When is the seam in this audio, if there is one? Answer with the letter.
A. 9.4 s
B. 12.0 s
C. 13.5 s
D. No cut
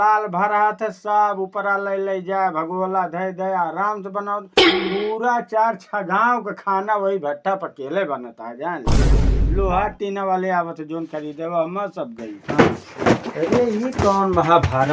A